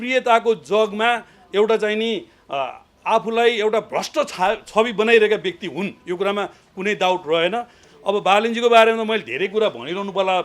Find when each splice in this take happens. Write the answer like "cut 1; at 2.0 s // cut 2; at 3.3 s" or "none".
cut 1; at 7.8 s